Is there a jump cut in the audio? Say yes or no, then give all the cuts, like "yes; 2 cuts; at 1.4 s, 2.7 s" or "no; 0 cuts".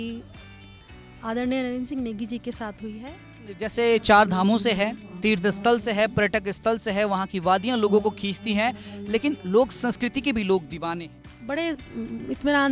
yes; 2 cuts; at 3.6 s, 11.1 s